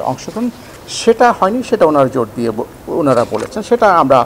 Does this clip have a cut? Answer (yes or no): no